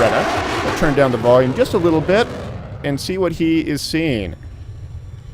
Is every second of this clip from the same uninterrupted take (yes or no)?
no